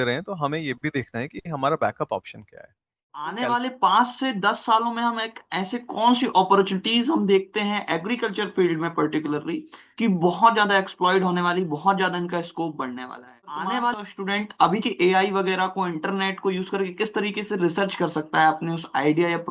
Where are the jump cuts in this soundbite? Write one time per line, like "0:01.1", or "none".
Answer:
0:03.3
0:13.8